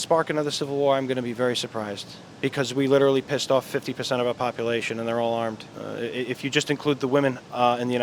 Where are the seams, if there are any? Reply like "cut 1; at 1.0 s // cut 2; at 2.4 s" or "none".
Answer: cut 1; at 5.7 s